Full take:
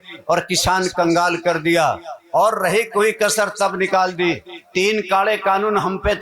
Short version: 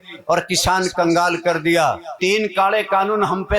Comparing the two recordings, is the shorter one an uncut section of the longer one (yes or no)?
no